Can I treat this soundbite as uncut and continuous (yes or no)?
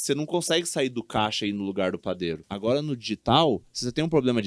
no